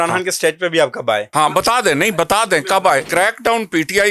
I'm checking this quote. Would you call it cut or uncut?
cut